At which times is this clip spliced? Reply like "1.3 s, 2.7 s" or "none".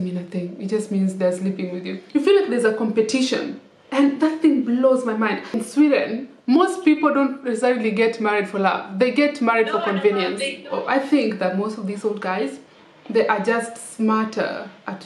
2.0 s, 5.6 s, 10.6 s